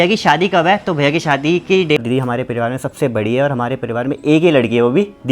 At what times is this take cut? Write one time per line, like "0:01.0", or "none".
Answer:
0:02.0